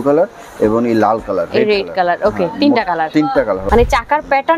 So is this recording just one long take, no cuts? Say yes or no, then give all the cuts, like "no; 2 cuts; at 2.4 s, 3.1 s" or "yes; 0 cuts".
no; 1 cut; at 3.6 s